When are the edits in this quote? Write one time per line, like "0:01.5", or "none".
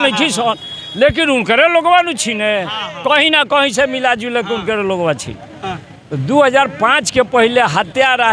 none